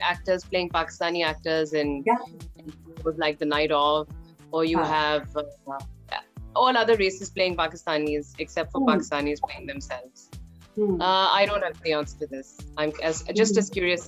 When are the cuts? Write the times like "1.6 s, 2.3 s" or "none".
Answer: none